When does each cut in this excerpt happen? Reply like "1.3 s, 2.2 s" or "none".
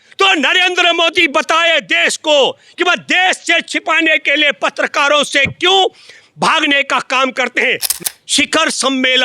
7.9 s